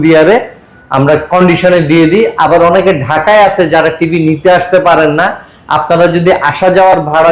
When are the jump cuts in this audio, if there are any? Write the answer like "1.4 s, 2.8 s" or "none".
none